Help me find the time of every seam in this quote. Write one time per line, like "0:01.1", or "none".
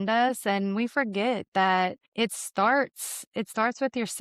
0:02.0